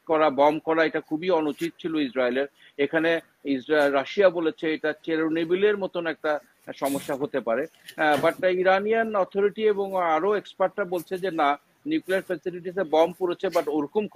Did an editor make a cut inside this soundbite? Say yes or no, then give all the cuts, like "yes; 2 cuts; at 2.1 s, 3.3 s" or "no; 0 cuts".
no; 0 cuts